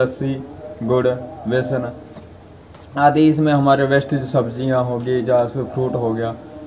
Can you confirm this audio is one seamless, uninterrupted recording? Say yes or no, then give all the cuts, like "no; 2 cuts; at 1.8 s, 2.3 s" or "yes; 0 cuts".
yes; 0 cuts